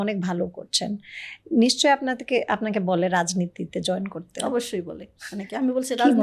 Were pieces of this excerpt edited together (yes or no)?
no